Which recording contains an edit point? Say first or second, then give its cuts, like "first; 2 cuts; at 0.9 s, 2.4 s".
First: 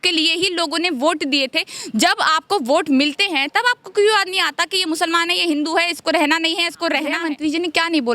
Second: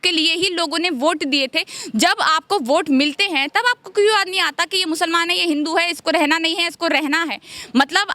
first; 1 cut; at 7.2 s